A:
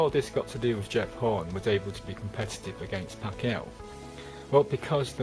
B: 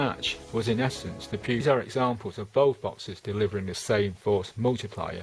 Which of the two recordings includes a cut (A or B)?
B